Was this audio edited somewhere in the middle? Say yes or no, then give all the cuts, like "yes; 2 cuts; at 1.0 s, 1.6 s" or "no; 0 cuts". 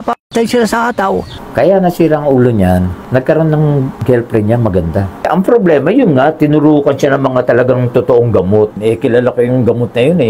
yes; 3 cuts; at 1.4 s, 5.1 s, 8.8 s